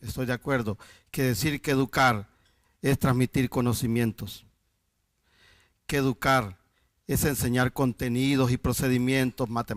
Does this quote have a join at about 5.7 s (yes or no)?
no